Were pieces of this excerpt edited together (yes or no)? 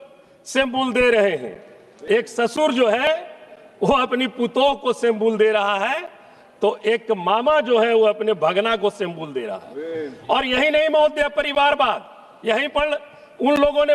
no